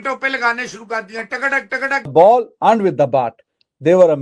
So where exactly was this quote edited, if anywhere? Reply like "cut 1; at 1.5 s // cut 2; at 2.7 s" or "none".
cut 1; at 2.1 s